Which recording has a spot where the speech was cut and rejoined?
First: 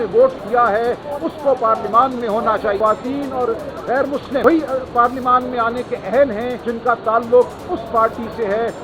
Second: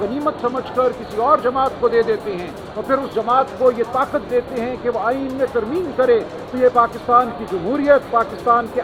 first; 3 cuts; at 2.8 s, 4.4 s, 6.6 s

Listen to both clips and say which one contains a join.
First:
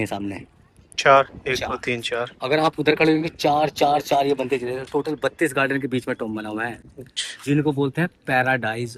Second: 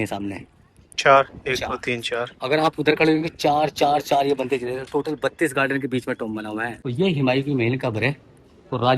second; 1 cut; at 6.8 s

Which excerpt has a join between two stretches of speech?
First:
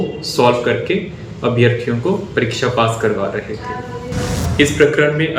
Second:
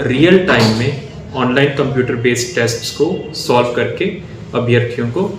first; 1 cut; at 4.4 s

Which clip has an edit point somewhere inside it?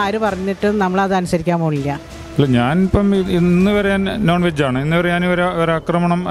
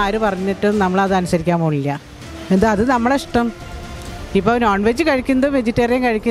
first; 1 cut; at 2.2 s

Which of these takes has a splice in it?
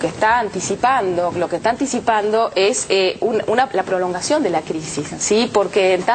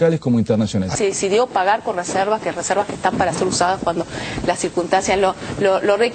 second; 1 cut; at 0.9 s

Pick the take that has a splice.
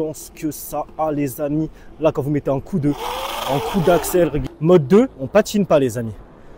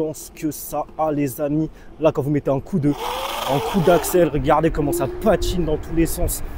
first; 1 cut; at 4.4 s

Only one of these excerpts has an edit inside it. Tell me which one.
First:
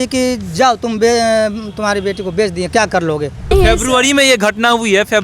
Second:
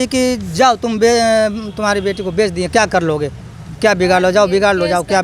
first; 1 cut; at 3.4 s

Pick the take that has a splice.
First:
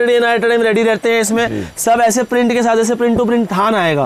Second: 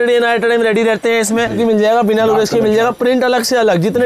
second; 1 cut; at 1.6 s

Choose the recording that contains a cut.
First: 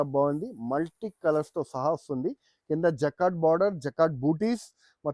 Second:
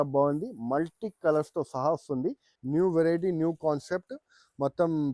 second; 1 cut; at 2.5 s

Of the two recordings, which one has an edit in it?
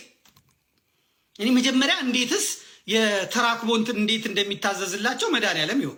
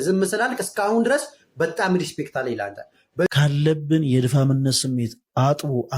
second; 1 cut; at 3.3 s

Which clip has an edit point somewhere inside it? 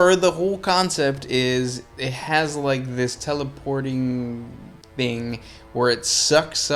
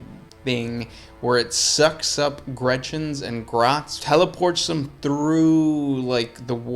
second; 1 cut; at 3.9 s

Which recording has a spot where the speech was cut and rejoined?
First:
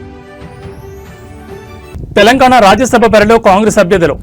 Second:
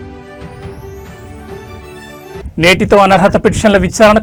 first; 1 cut; at 1.9 s

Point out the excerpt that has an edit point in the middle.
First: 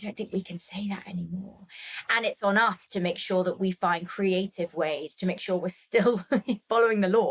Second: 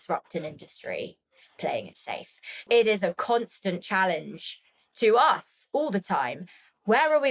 second; 1 cut; at 2.6 s

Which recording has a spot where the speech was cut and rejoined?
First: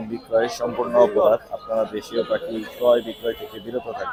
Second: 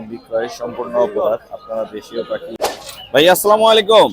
second; 1 cut; at 2.8 s

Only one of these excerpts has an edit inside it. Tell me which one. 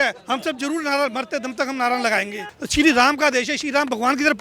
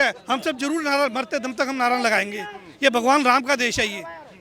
first; 1 cut; at 2.6 s

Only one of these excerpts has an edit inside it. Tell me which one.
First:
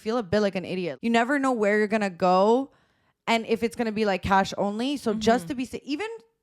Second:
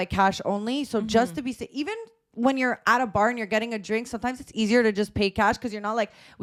first; 1 cut; at 0.9 s

